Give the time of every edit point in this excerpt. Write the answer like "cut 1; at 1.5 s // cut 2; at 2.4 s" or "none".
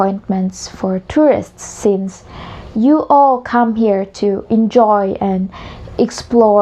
none